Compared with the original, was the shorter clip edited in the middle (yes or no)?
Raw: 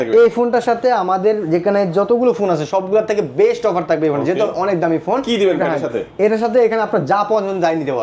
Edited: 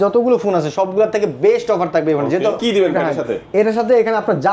yes